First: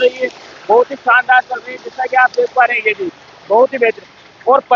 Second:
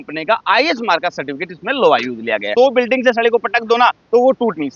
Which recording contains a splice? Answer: second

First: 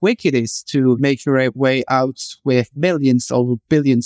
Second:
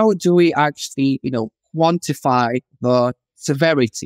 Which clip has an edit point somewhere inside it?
first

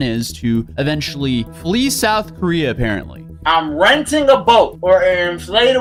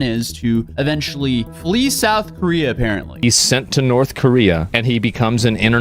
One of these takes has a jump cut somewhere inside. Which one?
second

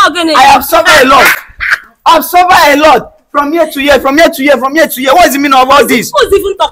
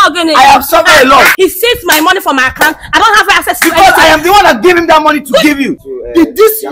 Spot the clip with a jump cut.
second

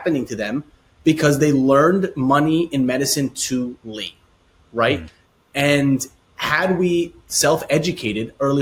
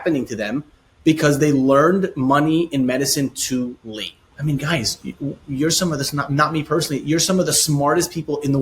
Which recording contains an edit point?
second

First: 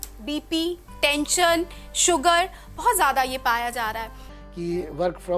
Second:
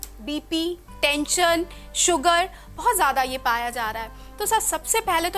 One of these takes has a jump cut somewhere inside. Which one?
first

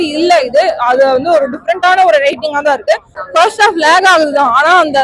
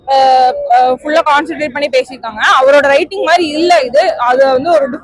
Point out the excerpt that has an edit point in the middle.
first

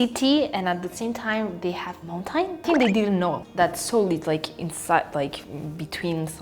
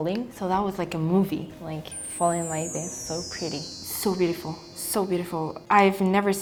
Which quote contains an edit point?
first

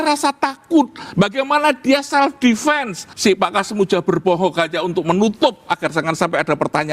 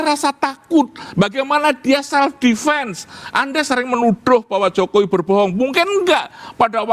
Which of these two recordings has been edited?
first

